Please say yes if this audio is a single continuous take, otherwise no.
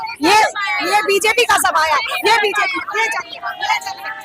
yes